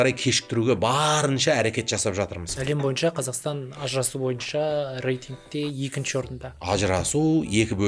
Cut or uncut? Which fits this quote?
cut